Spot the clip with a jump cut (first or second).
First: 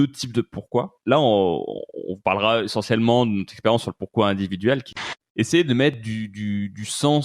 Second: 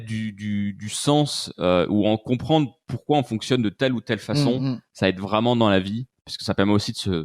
first